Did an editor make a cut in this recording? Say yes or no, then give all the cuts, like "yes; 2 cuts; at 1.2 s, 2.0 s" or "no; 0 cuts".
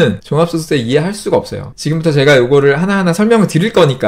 yes; 1 cut; at 1.7 s